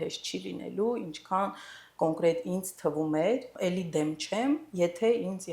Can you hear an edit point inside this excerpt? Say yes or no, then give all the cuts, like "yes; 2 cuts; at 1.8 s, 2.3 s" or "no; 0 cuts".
yes; 1 cut; at 3.6 s